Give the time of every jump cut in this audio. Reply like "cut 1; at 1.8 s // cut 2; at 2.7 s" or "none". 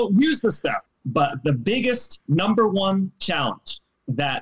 cut 1; at 0.9 s